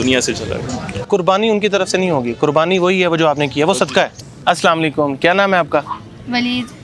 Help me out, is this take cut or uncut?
cut